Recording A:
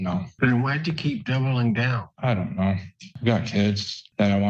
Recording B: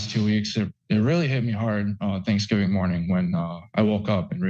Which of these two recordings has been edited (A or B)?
A